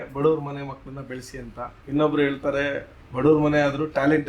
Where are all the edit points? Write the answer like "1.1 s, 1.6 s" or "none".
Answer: 1.7 s